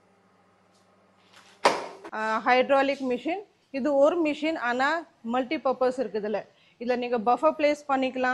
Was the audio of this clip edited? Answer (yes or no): yes